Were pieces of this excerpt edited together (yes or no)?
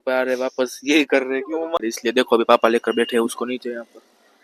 yes